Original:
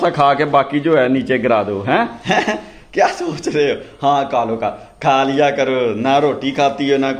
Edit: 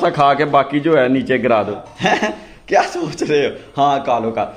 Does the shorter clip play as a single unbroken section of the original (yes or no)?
no